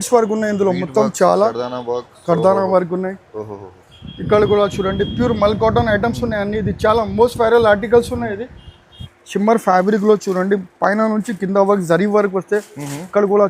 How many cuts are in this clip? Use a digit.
1